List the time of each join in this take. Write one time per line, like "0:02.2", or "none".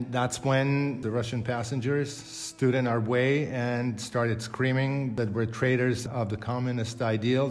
0:01.0
0:05.1
0:06.0